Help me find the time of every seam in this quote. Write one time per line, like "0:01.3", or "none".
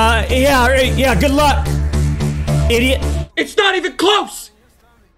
0:03.2

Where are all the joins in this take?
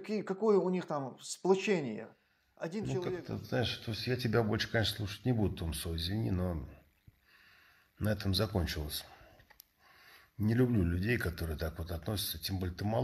0:03.2

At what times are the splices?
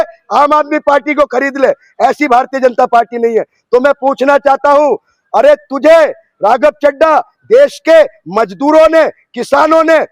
none

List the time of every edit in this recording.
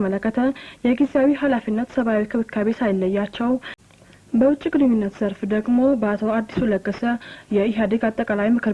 0:03.8

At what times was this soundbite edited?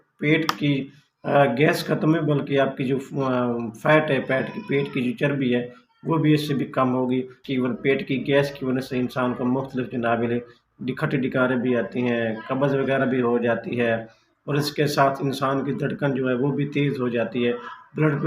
0:07.4

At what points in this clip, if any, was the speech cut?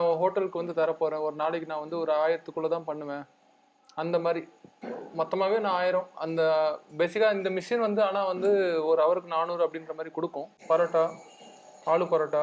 0:10.5

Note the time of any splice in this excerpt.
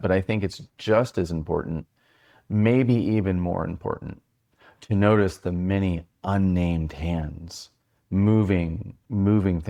none

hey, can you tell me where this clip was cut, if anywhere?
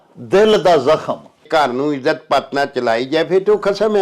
0:01.4

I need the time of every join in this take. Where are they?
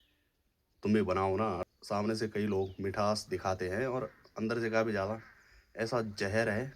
0:01.7

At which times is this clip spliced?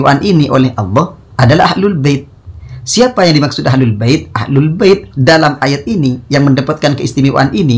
none

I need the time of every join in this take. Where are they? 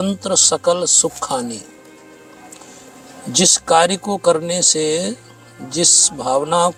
none

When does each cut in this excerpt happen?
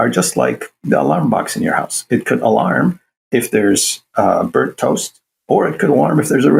none

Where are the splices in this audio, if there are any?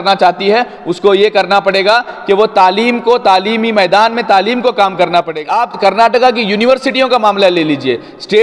0:05.3

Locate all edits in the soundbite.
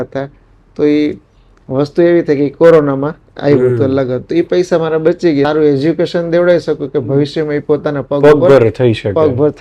0:05.5

